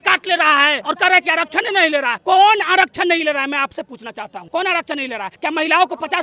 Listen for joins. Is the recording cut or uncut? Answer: cut